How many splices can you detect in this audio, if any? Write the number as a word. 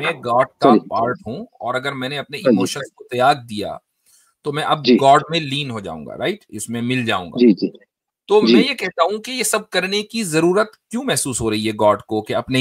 zero